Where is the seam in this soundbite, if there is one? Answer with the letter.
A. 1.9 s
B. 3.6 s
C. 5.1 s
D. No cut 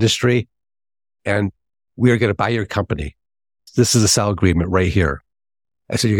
B